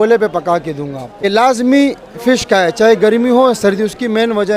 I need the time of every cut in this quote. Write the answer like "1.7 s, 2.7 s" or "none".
1.0 s